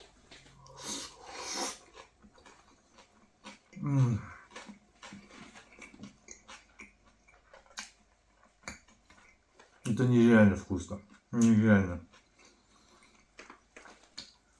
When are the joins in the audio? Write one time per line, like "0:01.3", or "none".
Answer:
none